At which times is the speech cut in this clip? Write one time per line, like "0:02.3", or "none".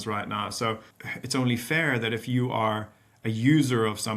0:01.0